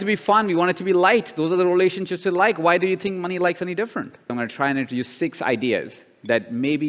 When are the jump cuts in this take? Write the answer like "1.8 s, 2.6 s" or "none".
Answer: 4.3 s